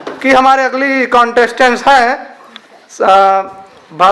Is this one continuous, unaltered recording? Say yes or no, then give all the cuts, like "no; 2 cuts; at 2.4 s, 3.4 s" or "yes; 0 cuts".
yes; 0 cuts